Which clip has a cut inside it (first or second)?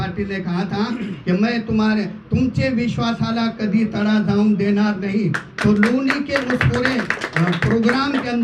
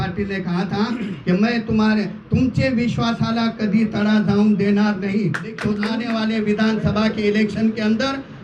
second